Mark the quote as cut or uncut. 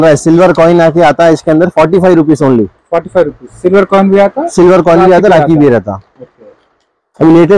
uncut